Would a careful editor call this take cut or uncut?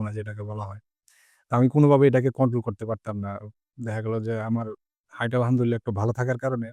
uncut